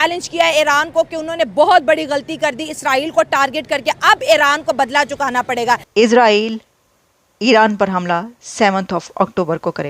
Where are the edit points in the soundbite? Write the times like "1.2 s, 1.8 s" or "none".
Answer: 5.9 s